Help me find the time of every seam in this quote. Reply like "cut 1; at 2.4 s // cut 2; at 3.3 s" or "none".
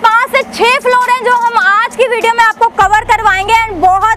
none